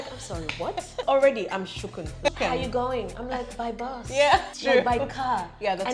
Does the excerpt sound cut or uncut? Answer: cut